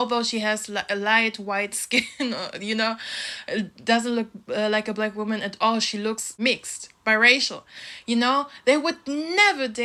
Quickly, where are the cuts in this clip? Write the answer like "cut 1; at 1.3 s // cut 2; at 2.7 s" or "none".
none